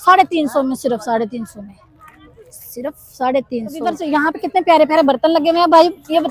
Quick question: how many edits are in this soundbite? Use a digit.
1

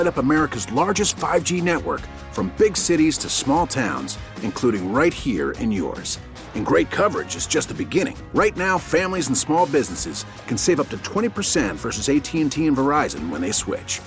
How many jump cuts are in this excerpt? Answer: 0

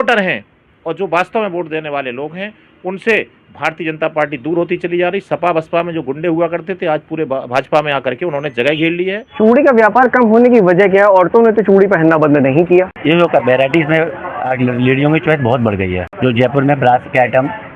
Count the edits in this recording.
3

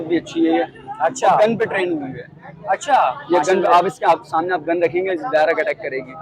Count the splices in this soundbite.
0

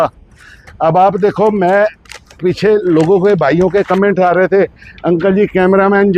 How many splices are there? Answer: 0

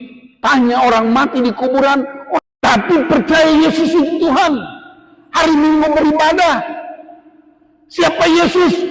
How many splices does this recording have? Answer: 1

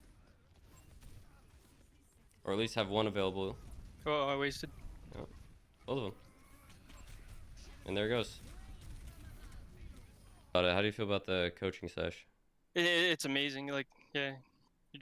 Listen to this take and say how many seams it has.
1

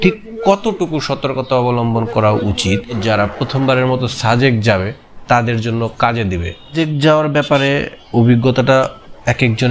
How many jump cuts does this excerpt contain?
2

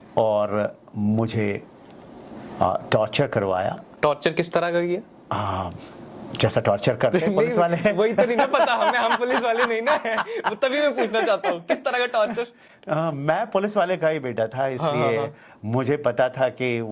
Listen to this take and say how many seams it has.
0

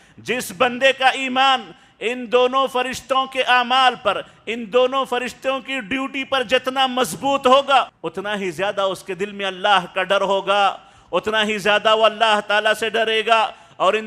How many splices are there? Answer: 1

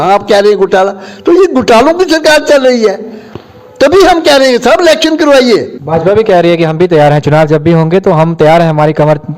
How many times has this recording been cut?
1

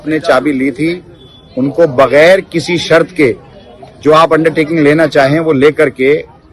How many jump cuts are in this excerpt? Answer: 0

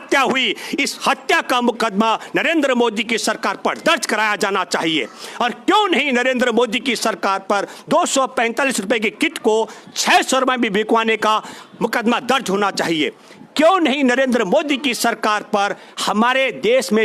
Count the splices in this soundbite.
0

